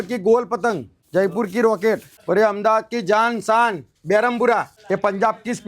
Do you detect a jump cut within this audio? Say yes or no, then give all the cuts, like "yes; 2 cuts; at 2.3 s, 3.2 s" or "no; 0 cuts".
yes; 4 cuts; at 0.9 s, 2.1 s, 3.9 s, 4.7 s